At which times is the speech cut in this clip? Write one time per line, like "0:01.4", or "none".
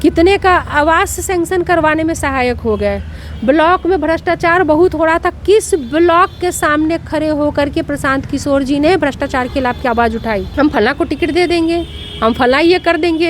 0:10.5